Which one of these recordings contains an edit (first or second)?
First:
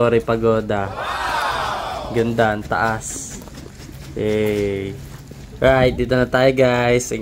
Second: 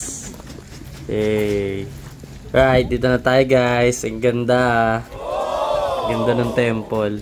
second